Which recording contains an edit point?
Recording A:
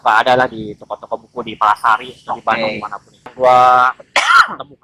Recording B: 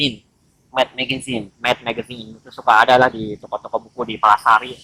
A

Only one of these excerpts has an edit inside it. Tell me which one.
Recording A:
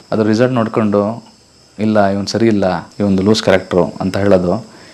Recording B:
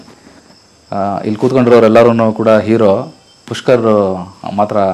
A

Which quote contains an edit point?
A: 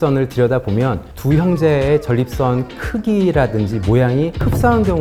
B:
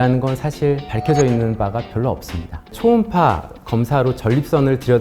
B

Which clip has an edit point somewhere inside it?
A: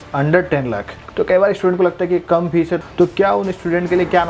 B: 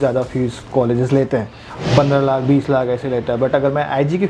A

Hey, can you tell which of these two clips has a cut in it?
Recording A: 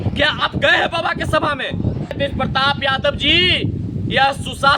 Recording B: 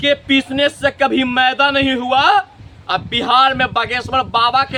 A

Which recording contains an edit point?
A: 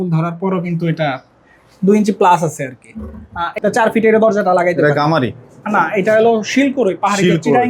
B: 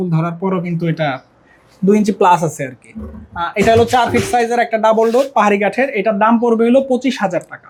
A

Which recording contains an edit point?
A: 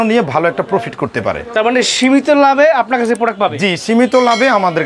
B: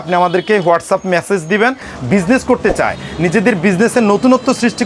B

